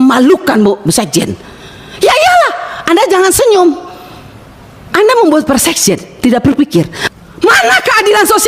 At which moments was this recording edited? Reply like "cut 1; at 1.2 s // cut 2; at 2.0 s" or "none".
cut 1; at 7.0 s